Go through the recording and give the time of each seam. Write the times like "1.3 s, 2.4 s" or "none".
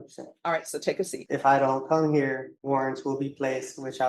1.2 s, 2.5 s